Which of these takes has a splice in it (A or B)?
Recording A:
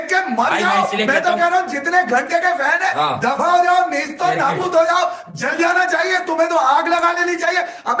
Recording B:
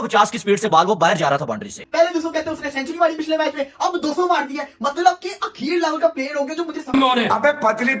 B